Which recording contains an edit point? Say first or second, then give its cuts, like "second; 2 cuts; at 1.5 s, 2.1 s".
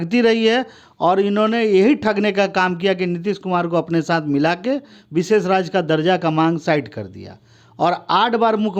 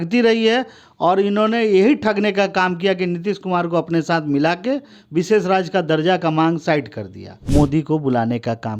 second; 1 cut; at 7.3 s